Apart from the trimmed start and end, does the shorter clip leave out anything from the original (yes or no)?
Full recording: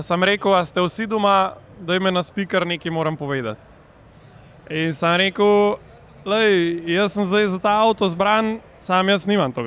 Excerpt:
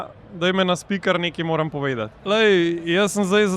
yes